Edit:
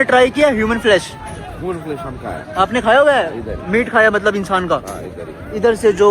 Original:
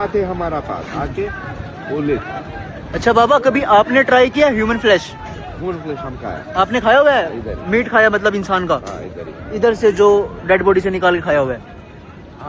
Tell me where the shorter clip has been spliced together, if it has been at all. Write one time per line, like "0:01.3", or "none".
none